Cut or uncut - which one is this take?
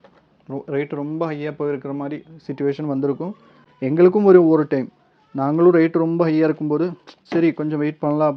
uncut